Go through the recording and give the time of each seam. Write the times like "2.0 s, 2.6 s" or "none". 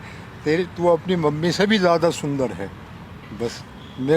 none